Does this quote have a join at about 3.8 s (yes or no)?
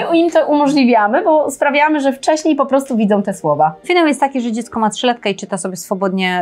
yes